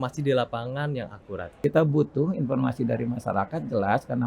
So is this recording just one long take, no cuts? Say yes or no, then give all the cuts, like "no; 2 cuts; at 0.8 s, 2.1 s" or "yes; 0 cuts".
no; 1 cut; at 1.5 s